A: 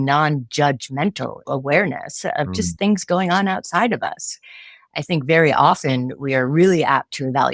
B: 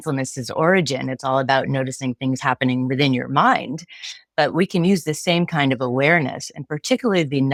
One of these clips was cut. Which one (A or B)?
A